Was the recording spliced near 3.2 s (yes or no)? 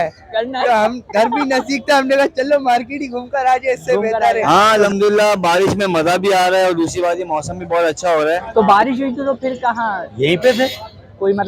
no